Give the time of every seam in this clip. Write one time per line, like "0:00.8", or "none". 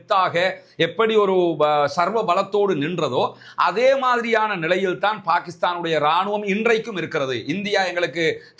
none